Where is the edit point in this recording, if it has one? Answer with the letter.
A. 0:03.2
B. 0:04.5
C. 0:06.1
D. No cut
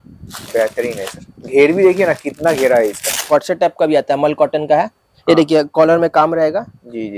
A